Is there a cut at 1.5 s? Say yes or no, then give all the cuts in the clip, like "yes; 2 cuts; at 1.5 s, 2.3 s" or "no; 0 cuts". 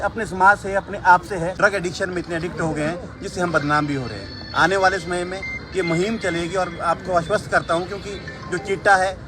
yes; 1 cut; at 1.5 s